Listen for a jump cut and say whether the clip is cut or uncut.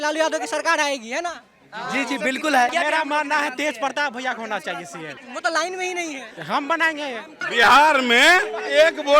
cut